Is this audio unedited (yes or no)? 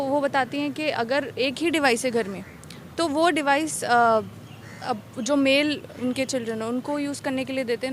yes